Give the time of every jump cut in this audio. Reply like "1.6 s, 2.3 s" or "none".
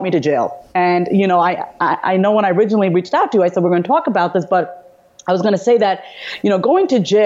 none